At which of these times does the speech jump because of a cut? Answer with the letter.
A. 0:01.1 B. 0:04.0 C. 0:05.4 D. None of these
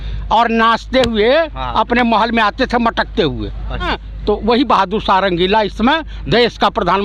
B